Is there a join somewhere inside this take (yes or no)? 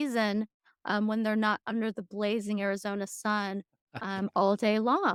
no